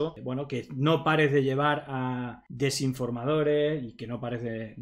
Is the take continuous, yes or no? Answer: yes